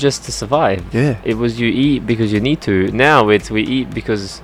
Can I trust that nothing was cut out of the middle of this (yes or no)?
yes